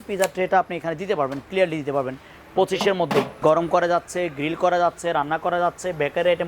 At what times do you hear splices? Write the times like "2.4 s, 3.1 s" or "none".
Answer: 3.4 s